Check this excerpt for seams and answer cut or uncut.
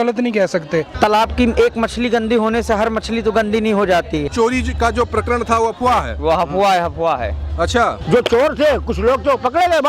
cut